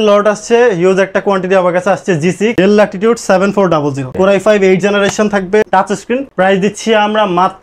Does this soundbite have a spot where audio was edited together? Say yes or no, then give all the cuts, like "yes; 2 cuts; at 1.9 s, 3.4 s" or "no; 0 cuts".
yes; 2 cuts; at 2.5 s, 5.7 s